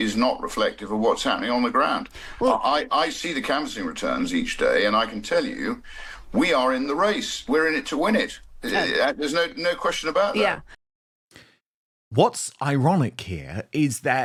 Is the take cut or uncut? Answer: uncut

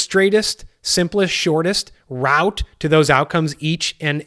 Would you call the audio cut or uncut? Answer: uncut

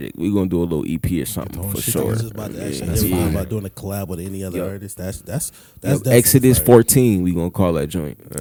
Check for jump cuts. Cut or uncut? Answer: uncut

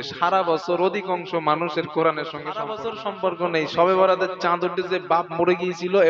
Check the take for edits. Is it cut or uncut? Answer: cut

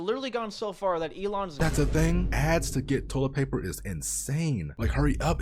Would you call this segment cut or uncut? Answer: cut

